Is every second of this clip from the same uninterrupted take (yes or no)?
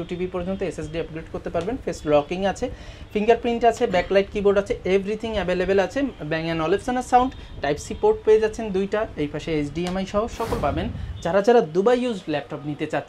no